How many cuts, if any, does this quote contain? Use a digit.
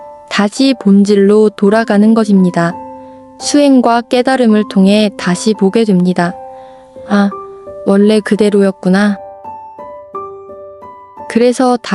0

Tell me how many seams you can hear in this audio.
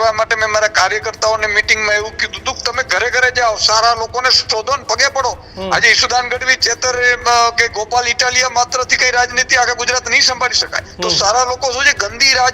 2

